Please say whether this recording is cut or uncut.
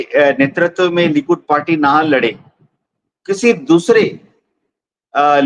uncut